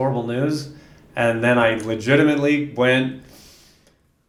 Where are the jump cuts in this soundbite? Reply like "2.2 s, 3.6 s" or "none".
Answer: none